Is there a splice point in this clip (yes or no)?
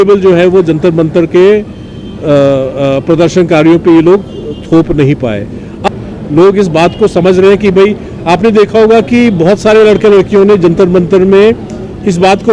yes